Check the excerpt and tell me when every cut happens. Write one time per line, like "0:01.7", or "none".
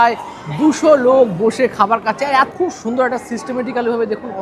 0:02.5